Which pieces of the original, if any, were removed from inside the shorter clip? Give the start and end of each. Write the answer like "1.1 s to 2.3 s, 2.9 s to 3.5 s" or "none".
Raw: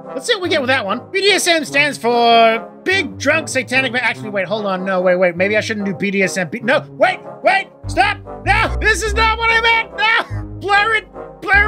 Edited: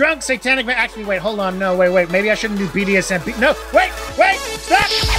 none